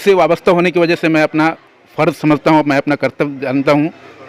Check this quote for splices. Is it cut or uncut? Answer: uncut